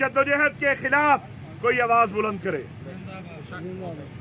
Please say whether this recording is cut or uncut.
uncut